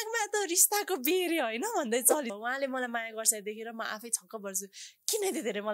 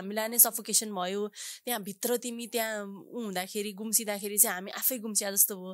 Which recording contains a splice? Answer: first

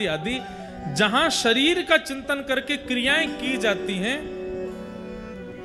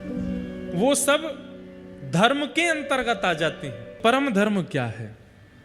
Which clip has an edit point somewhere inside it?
second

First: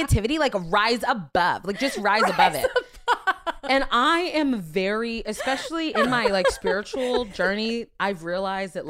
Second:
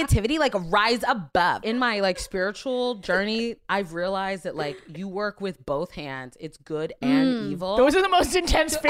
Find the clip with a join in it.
second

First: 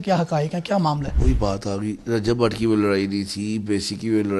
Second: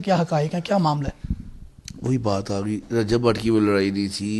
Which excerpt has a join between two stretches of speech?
first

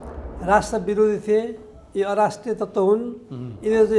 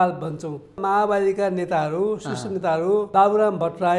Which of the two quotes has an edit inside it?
second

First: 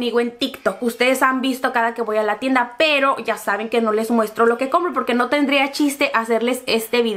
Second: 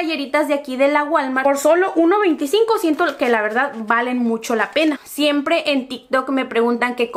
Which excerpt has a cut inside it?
second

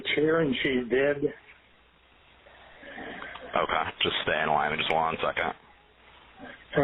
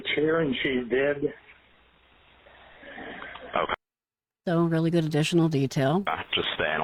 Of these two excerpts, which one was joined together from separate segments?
first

